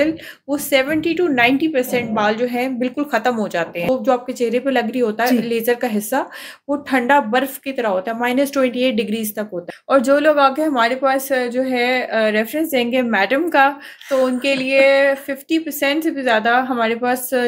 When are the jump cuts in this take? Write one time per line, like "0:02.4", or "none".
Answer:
0:03.9
0:09.8